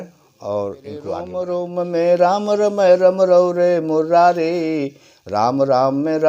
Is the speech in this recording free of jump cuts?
no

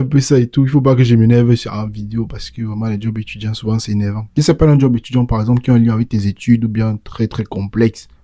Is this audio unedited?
no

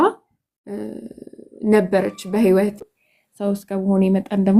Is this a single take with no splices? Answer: no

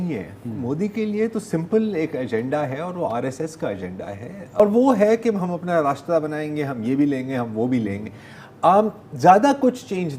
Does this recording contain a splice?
yes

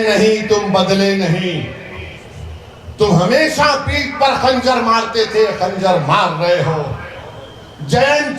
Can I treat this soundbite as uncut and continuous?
yes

